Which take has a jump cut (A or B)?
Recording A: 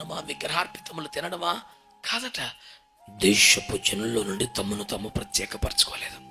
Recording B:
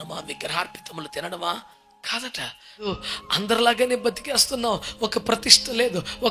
B